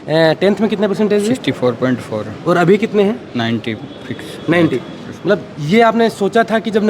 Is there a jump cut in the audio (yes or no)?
no